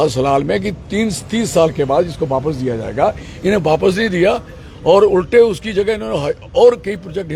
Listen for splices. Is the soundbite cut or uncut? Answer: uncut